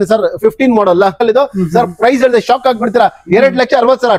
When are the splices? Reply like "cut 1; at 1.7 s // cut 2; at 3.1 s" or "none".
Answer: cut 1; at 1.2 s